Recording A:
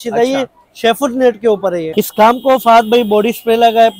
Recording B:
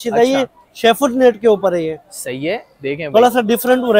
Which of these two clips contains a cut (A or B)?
A